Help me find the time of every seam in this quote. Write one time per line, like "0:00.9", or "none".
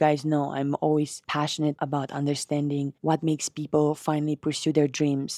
0:01.6
0:02.9